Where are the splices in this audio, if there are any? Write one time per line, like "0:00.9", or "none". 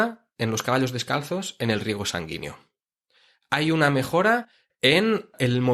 none